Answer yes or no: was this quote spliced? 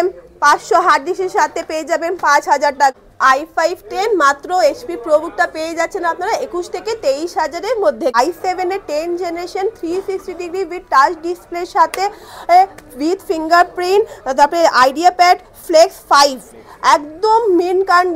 yes